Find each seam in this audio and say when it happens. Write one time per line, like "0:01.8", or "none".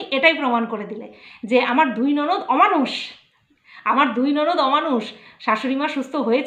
none